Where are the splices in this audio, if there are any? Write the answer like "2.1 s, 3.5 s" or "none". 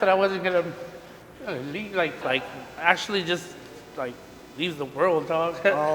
2.2 s